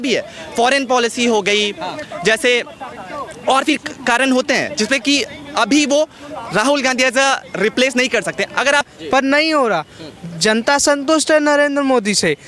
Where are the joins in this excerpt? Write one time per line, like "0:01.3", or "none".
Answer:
0:08.8